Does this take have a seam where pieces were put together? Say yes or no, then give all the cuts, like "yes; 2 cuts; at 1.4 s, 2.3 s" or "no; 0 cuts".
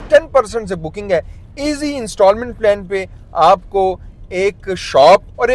no; 0 cuts